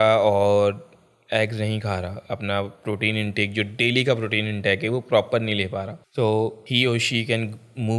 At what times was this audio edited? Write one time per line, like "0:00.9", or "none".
0:06.0
0:06.6

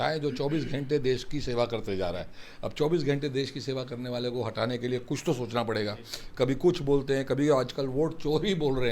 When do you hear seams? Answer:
none

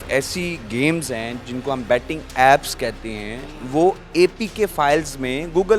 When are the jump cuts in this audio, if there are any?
none

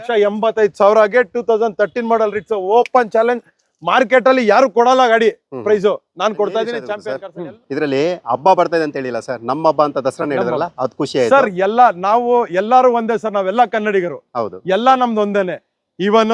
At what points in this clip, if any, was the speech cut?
0:07.0

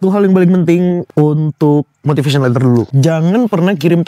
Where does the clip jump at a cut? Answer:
0:01.1
0:02.9

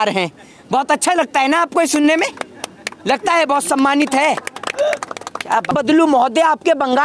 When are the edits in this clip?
0:05.7

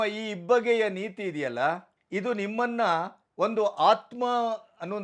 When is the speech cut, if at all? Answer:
0:01.9
0:03.2

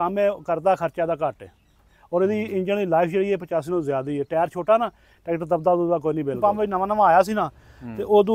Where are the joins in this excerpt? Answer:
0:06.4

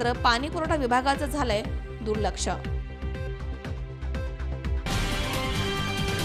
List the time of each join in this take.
none

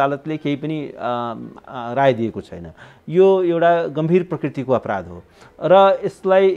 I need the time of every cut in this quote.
none

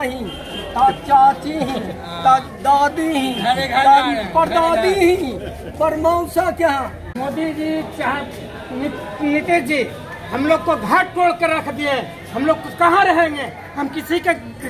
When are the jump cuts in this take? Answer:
0:07.1

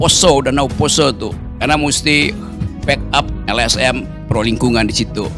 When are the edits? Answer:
0:01.5
0:03.3

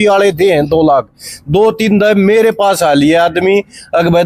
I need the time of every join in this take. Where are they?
none

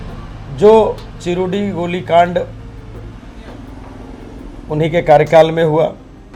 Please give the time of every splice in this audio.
none

